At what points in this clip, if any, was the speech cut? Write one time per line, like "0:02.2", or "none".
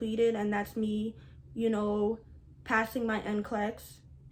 none